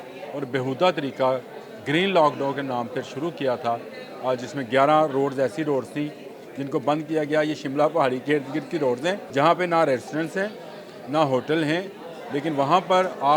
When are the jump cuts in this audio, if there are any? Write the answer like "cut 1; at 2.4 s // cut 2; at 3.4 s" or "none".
cut 1; at 9.2 s